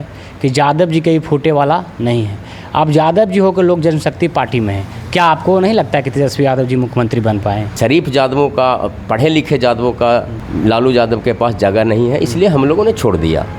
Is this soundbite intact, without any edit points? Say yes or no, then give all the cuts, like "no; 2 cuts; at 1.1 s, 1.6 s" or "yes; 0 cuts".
no; 2 cuts; at 7.7 s, 10.4 s